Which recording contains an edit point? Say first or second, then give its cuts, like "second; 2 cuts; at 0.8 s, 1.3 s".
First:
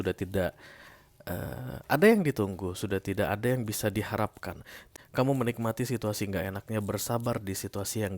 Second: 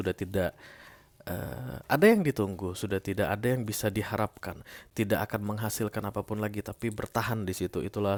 first; 1 cut; at 4.8 s